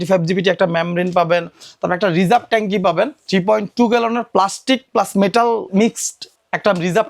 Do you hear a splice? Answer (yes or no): yes